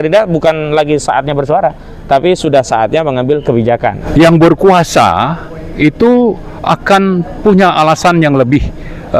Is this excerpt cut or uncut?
cut